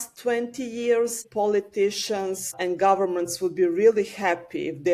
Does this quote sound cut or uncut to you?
cut